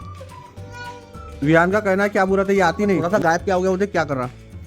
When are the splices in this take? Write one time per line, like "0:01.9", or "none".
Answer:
0:03.0